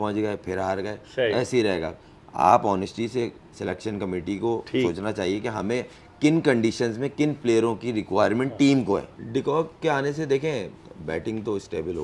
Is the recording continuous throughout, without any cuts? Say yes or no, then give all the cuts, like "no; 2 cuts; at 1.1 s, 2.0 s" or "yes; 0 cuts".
no; 1 cut; at 9.2 s